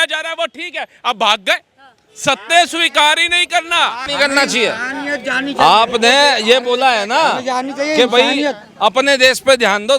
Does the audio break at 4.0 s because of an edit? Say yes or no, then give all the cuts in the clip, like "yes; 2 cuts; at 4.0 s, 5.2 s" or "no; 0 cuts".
yes; 1 cut; at 4.0 s